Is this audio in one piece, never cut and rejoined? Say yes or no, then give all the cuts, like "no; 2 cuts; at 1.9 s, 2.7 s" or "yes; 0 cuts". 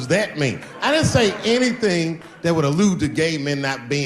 yes; 0 cuts